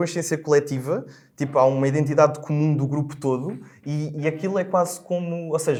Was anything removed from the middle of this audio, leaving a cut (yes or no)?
no